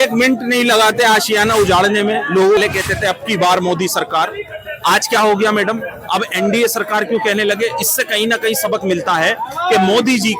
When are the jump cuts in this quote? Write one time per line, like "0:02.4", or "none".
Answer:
0:02.6